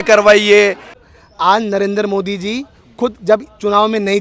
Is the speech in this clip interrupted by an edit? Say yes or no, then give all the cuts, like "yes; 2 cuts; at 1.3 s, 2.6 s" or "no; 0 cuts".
yes; 1 cut; at 0.9 s